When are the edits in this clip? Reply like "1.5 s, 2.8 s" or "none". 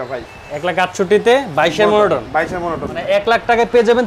3.2 s

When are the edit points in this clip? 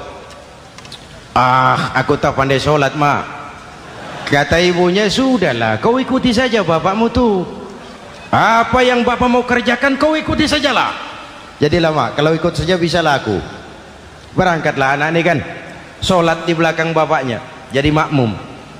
4.1 s

